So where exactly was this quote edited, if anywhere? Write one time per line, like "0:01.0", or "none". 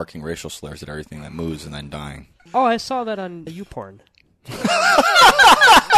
0:02.4
0:03.5